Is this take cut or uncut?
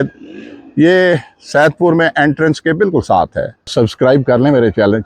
cut